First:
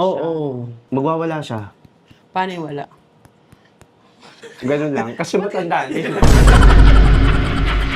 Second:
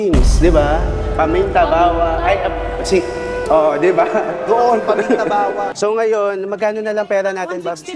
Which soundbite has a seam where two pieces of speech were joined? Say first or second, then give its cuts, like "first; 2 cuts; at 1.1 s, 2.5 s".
second; 1 cut; at 5.7 s